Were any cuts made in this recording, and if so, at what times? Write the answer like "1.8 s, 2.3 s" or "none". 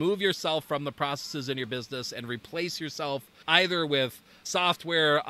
3.3 s